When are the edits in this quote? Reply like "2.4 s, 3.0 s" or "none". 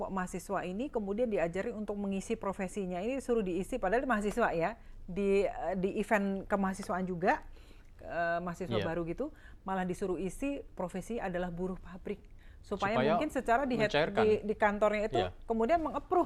none